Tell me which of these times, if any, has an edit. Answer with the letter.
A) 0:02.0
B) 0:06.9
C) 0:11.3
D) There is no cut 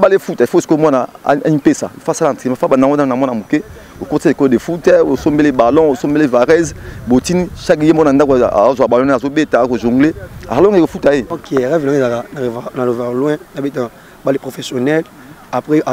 C